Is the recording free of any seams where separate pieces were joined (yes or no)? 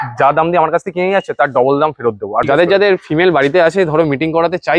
no